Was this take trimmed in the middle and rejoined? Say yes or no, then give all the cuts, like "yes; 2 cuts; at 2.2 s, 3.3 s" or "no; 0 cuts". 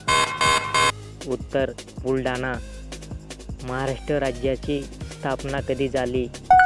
yes; 1 cut; at 0.9 s